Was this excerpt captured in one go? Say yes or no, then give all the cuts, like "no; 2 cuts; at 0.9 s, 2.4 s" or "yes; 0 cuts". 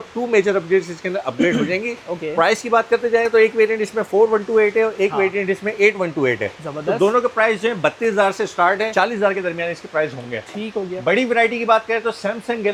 yes; 0 cuts